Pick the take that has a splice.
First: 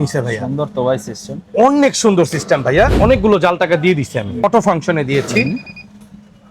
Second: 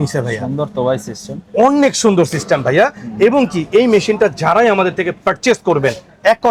first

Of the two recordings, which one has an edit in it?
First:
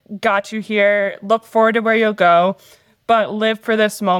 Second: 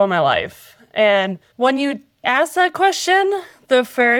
second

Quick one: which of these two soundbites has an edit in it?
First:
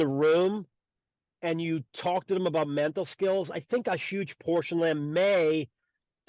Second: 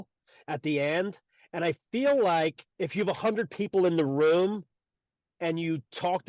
second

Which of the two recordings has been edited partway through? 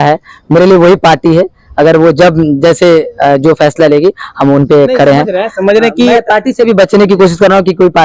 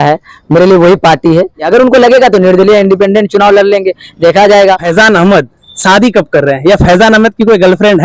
second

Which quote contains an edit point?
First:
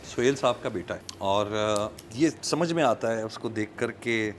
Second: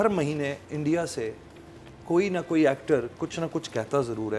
first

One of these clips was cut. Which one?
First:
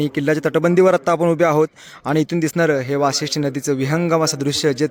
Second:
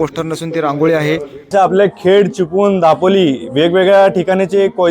second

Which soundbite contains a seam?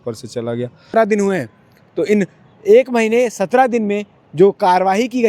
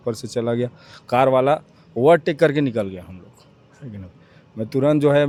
first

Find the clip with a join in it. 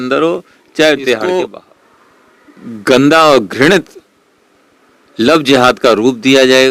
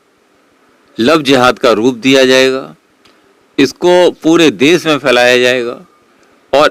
first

